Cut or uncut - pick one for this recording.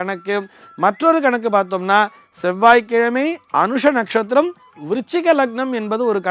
uncut